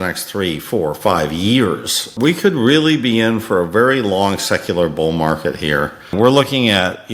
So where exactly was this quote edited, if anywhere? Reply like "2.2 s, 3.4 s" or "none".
2.1 s, 6.1 s